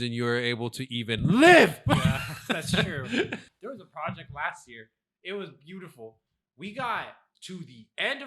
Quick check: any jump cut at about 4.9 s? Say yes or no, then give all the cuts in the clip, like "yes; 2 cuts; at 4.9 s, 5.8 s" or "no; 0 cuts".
no; 1 cut; at 3.5 s